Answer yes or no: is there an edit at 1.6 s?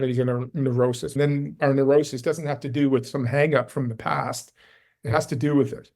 yes